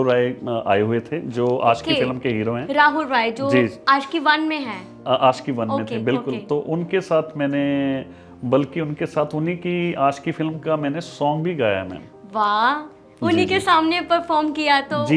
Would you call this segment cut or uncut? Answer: uncut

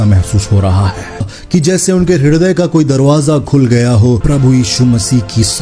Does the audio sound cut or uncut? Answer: cut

